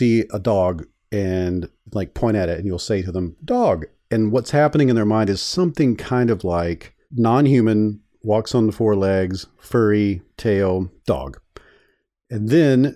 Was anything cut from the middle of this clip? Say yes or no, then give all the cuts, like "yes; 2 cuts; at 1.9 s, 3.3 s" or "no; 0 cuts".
no; 0 cuts